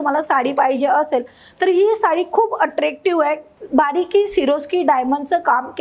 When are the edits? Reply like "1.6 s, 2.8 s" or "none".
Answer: 3.5 s